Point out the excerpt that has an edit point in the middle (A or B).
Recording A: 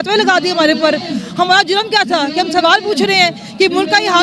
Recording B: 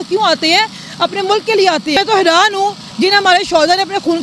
B